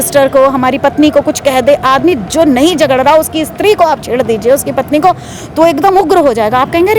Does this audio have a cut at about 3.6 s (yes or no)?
no